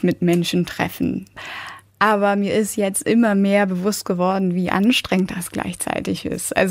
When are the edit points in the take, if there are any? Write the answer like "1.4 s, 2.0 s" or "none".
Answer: 1.4 s